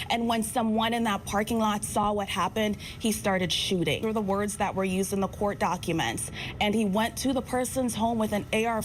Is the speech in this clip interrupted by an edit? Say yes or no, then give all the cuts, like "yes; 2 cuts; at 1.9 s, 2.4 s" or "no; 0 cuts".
no; 0 cuts